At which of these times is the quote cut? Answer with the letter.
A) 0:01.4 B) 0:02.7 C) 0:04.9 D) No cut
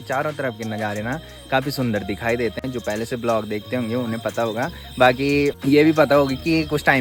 D